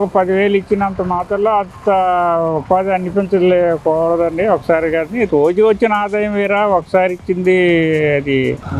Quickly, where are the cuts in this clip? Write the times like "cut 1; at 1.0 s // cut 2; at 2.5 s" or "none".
none